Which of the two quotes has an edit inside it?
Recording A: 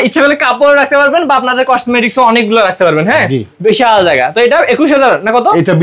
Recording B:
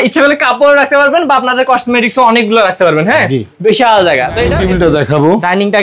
B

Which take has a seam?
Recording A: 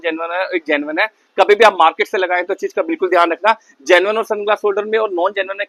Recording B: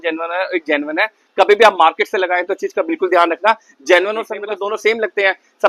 B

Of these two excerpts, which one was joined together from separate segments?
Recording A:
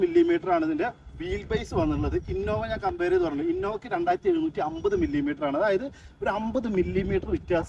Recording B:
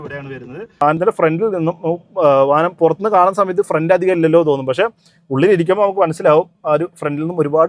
B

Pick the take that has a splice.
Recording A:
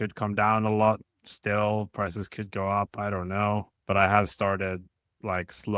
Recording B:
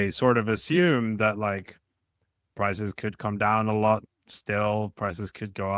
A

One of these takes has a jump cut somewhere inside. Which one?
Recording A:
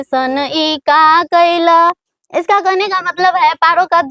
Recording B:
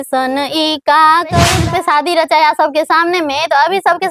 B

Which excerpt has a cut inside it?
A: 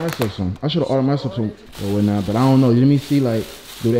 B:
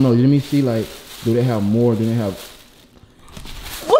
A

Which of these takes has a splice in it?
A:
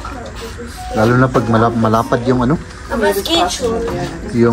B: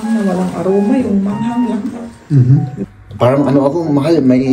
B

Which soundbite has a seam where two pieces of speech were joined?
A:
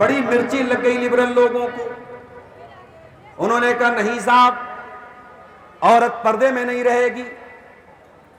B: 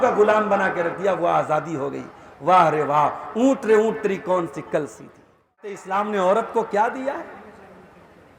B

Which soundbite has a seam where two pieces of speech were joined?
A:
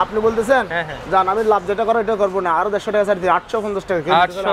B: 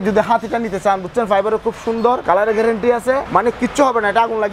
B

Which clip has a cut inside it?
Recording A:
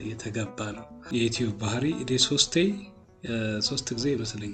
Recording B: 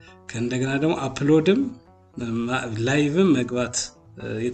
A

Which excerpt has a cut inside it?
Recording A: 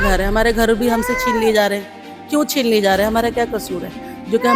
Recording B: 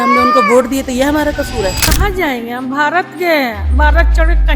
B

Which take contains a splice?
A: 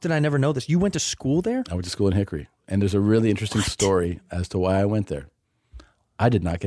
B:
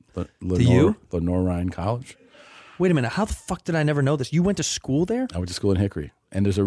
B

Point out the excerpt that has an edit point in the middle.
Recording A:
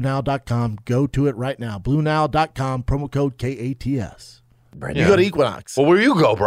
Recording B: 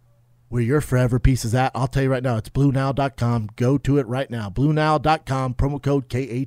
A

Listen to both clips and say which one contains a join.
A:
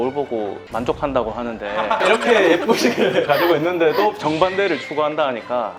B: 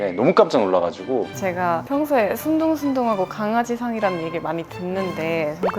B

